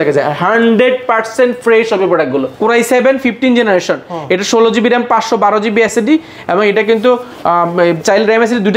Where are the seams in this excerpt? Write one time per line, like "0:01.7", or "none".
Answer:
0:02.5